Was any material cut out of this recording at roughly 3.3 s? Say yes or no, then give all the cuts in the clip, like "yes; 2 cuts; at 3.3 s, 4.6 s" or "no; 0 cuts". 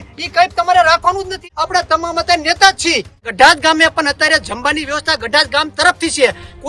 yes; 2 cuts; at 1.4 s, 3.3 s